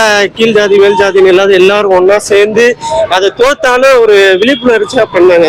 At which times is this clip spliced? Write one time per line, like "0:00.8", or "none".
none